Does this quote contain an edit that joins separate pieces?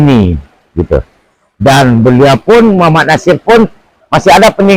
no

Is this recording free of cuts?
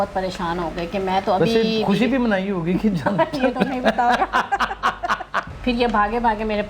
no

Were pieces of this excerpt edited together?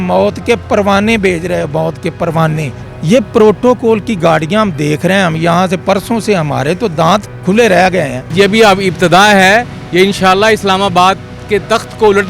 yes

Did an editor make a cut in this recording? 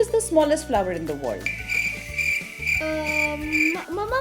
no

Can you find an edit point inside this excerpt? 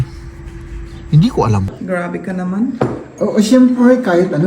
yes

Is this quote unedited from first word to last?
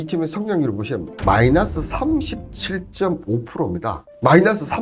yes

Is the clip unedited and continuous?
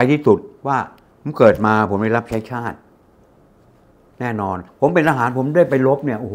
no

